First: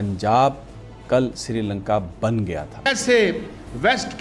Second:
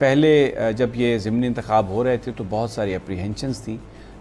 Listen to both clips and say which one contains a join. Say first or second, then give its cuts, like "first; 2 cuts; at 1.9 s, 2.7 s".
first; 1 cut; at 2.9 s